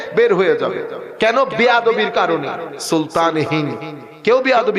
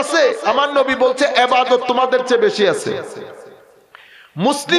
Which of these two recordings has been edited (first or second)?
first